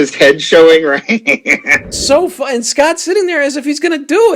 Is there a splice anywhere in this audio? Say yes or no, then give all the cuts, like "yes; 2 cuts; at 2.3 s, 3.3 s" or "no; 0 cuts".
yes; 1 cut; at 1.9 s